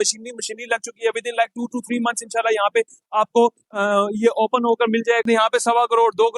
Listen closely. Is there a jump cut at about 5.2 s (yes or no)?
yes